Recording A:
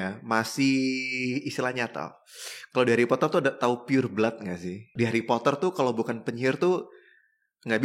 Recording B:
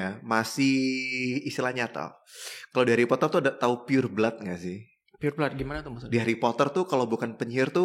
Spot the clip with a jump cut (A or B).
A